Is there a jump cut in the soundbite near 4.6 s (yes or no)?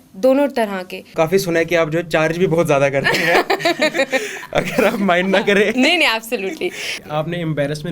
no